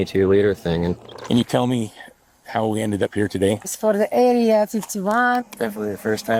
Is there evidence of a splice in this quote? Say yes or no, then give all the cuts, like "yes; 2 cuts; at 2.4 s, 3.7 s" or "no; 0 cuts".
yes; 3 cuts; at 1.0 s, 3.7 s, 5.4 s